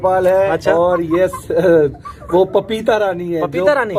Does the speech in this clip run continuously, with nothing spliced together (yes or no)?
yes